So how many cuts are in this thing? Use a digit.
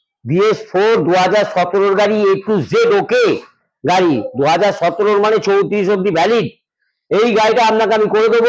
0